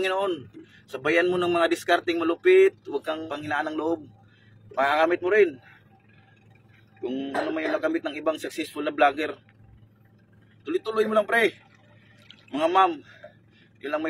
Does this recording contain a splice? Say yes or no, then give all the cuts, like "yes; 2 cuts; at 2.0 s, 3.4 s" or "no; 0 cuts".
yes; 1 cut; at 3.2 s